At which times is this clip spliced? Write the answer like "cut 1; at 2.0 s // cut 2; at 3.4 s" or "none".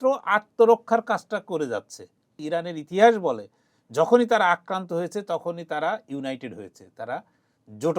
cut 1; at 2.3 s